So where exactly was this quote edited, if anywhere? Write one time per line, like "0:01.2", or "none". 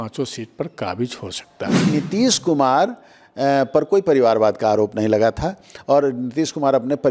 0:01.9